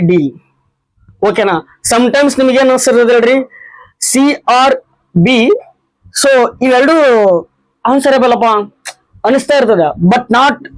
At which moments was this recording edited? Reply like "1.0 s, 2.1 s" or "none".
none